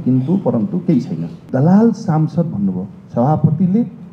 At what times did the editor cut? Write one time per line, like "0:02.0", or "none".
0:01.4